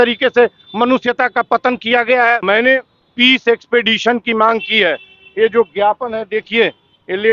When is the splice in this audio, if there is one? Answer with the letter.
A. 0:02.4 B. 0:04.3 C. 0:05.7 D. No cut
A